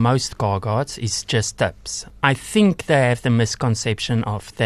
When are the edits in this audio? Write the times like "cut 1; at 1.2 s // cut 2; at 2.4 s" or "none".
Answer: none